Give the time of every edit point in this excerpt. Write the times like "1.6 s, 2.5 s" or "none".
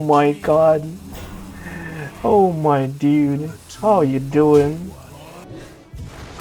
5.4 s